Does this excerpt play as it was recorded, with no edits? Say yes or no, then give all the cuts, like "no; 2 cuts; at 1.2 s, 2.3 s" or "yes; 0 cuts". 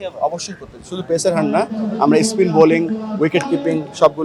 yes; 0 cuts